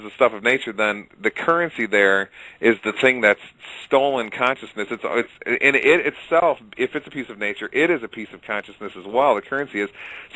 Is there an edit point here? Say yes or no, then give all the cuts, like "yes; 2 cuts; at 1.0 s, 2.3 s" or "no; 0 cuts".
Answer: yes; 1 cut; at 6.5 s